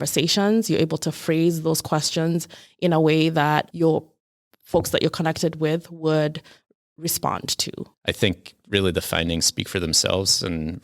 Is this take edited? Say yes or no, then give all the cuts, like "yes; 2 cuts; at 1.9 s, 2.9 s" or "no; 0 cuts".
yes; 1 cut; at 7.8 s